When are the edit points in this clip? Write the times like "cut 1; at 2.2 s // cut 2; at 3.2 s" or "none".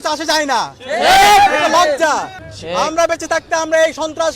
cut 1; at 2.4 s